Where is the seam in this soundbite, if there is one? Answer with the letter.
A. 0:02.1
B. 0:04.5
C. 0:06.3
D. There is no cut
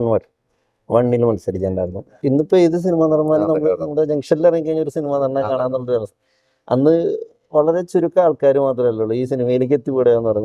A